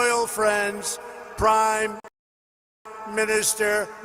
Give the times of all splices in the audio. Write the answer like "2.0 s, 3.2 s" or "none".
none

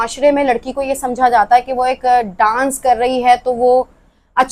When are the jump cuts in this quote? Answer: none

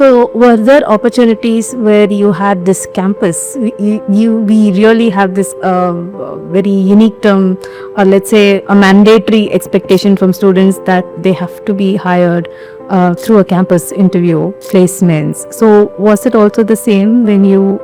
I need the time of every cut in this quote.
none

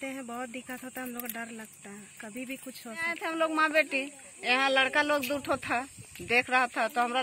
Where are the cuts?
3.2 s

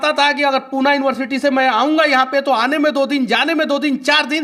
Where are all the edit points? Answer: none

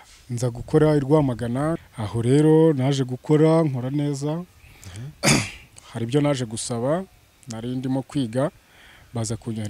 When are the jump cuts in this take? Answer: 1.9 s

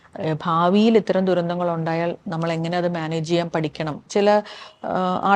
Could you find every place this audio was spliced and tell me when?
4.1 s

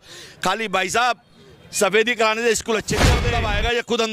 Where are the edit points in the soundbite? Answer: 3.2 s

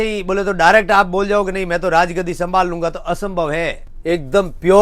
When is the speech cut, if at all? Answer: 3.8 s

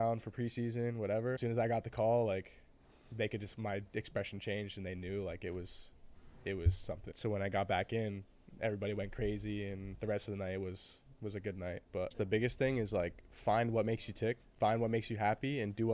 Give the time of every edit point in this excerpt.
1.4 s, 7.1 s, 12.1 s, 14.5 s

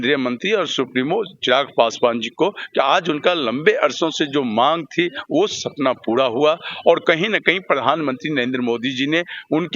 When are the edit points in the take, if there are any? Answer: none

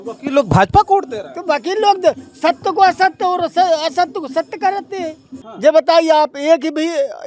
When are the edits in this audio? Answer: 5.4 s

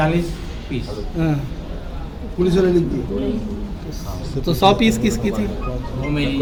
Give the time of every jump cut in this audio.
none

